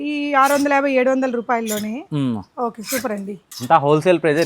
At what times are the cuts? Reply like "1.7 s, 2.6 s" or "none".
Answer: 3.5 s